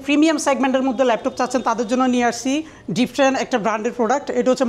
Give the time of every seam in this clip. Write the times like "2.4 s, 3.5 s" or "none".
none

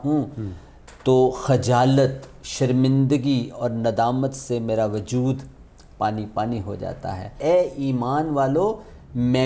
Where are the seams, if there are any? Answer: 7.3 s

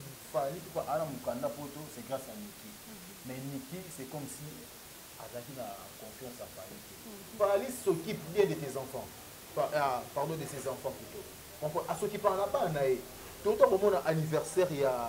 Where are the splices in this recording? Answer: 7.3 s

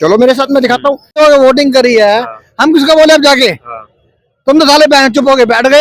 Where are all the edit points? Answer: 1.2 s

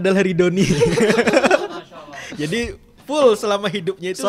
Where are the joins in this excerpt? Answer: none

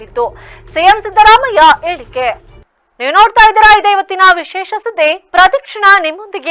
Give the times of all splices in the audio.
none

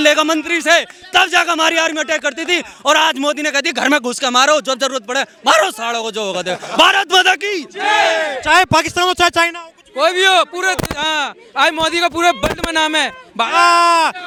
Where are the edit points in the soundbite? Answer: none

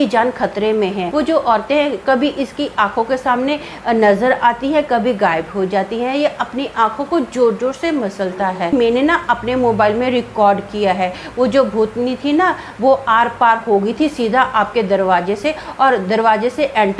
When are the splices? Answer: 1.1 s, 8.7 s

